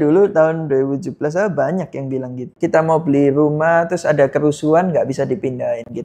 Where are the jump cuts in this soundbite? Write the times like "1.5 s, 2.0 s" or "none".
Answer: 2.5 s

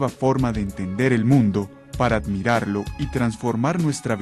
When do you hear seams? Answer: none

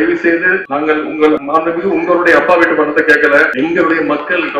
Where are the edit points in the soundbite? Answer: 1.4 s

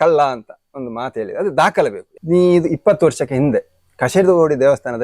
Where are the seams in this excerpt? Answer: 2.1 s

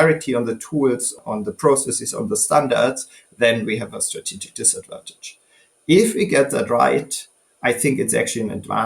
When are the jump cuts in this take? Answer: 1.1 s

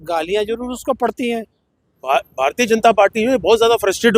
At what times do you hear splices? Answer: 1.9 s

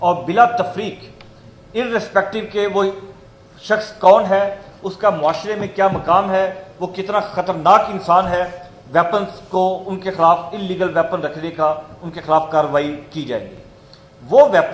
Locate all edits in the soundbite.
none

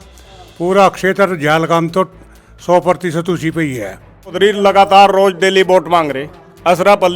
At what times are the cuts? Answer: 4.3 s

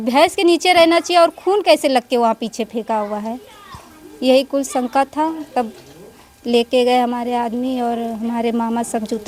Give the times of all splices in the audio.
none

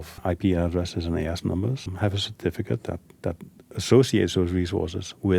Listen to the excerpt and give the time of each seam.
1.9 s

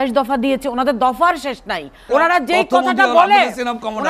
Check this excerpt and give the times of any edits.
2.0 s

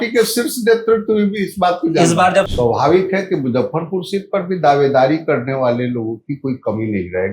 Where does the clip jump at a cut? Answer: 2.5 s

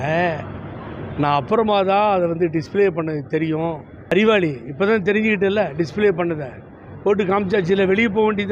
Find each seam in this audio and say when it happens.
3.9 s

